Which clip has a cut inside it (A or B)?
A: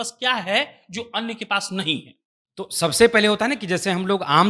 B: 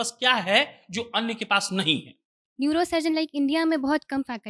B